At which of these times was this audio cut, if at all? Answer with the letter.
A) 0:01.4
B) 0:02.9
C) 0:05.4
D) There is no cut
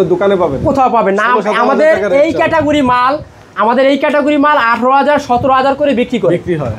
D